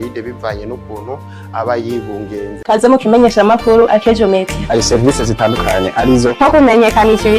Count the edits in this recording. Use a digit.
1